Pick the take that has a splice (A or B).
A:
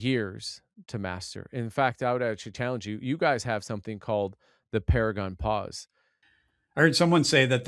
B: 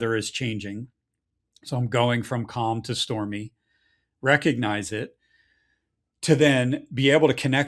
A